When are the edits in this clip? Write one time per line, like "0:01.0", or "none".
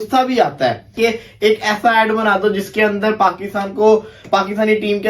0:01.0